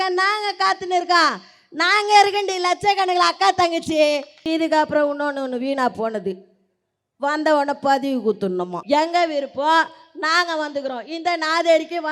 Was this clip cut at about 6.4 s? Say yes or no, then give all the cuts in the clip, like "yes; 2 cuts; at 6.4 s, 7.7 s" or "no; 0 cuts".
no; 2 cuts; at 4.3 s, 8.8 s